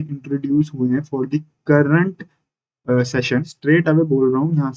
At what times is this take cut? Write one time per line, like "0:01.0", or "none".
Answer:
0:03.5